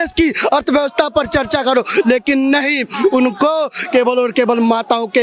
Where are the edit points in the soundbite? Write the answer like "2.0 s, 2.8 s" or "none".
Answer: none